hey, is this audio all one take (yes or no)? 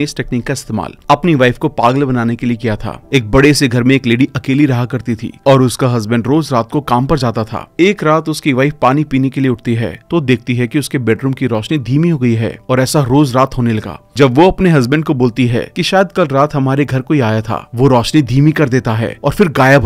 yes